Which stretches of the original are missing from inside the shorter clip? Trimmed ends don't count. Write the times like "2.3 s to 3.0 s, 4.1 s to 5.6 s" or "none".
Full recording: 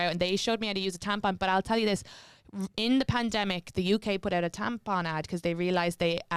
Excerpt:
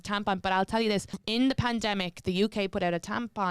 2.1 s to 2.7 s